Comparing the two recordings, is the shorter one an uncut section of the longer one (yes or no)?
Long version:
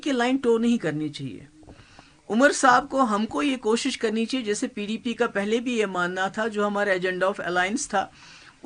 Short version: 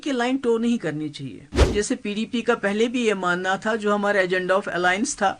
no